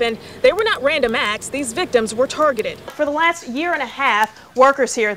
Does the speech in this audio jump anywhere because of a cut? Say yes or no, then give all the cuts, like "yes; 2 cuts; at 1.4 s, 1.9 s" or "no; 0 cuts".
yes; 1 cut; at 2.9 s